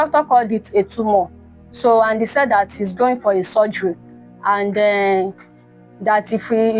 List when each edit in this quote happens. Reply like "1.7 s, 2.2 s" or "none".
none